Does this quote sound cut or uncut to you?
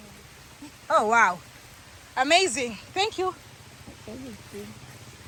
uncut